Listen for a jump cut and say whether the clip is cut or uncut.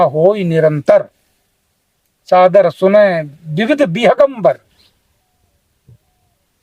uncut